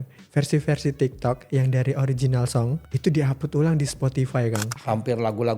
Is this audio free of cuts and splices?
no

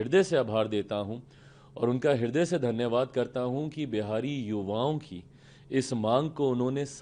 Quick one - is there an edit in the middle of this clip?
no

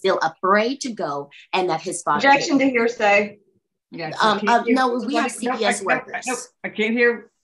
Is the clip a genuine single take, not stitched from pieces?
yes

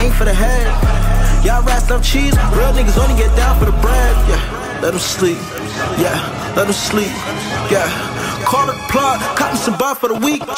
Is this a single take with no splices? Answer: yes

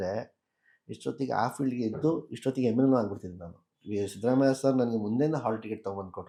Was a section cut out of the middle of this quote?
no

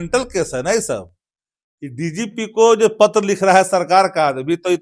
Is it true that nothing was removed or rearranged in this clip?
yes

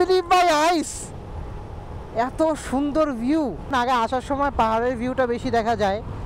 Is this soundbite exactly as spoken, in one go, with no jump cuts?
no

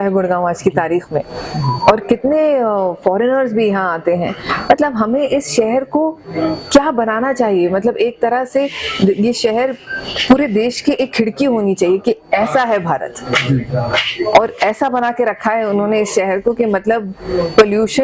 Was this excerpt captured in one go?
yes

